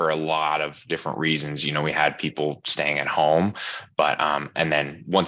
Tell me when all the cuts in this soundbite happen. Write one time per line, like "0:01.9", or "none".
none